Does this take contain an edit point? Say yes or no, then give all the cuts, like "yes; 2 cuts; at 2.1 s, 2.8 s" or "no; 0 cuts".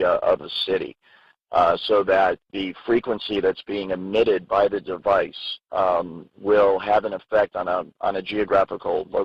no; 0 cuts